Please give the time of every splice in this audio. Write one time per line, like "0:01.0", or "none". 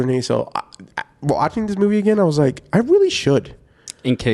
none